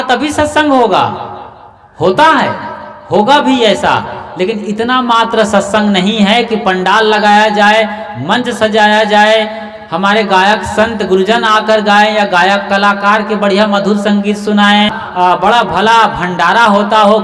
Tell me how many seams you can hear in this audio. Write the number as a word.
one